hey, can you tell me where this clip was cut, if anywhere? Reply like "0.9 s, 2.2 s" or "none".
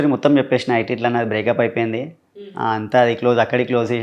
none